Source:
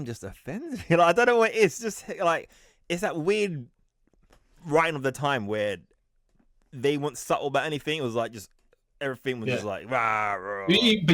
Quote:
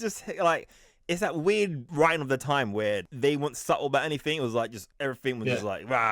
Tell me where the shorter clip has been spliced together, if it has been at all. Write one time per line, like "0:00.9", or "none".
0:01.8
0:03.1
0:04.8